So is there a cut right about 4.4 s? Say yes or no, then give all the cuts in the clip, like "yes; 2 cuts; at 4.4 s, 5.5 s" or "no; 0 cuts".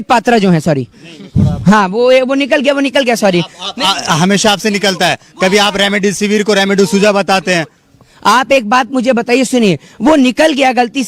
no; 0 cuts